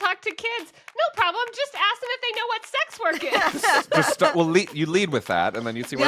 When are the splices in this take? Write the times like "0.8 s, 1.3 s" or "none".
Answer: none